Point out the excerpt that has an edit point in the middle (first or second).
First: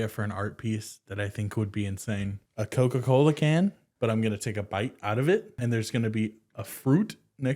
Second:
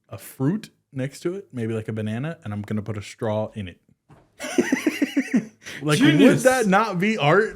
first